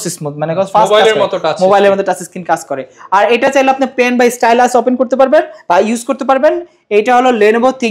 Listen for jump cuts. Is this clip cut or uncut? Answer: uncut